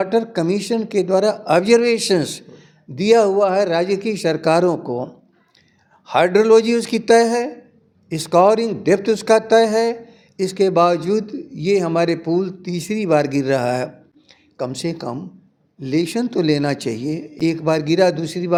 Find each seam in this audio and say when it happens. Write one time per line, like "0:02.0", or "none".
none